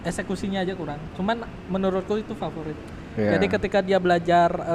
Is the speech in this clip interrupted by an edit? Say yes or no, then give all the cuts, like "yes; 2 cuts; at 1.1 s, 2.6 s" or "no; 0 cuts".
no; 0 cuts